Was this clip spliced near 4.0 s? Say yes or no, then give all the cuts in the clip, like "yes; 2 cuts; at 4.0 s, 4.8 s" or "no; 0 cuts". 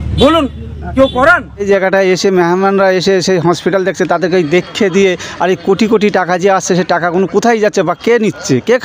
no; 1 cut; at 1.6 s